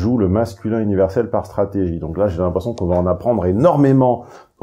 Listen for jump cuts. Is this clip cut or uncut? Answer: uncut